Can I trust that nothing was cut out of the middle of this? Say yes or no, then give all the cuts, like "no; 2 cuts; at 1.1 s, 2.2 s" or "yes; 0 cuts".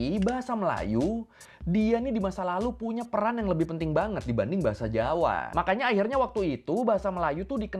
no; 1 cut; at 5.5 s